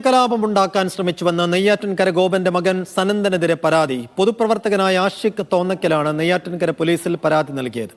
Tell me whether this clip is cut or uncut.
uncut